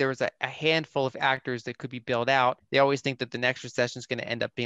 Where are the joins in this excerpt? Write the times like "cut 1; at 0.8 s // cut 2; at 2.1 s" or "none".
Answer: cut 1; at 2.6 s